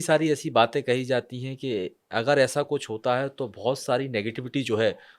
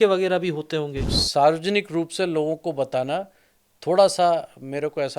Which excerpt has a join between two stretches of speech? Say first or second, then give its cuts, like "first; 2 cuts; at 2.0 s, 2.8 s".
second; 1 cut; at 1.0 s